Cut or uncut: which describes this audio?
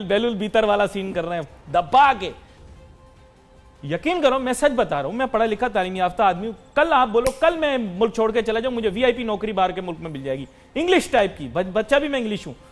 uncut